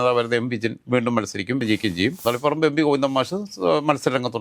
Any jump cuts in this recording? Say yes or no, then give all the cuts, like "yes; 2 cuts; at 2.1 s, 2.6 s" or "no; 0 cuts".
yes; 1 cut; at 2.2 s